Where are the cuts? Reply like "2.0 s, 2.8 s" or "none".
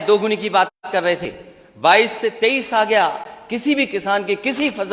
none